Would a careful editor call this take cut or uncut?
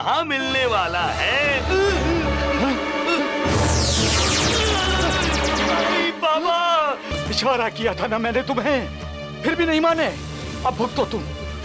cut